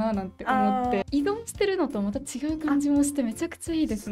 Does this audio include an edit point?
yes; 1 cut; at 1.0 s

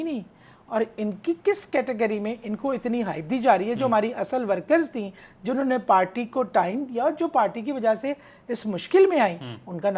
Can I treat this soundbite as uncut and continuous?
yes; 0 cuts

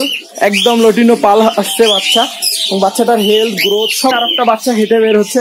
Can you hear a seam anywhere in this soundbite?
yes; 1 cut; at 4.1 s

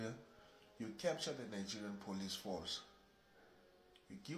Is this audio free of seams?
yes; 0 cuts

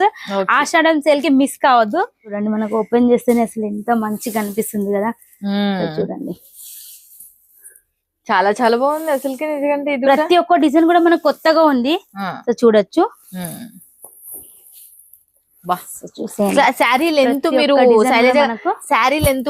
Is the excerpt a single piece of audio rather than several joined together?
no; 1 cut; at 2.3 s

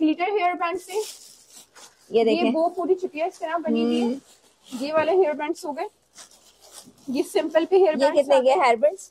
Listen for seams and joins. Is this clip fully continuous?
yes; 0 cuts

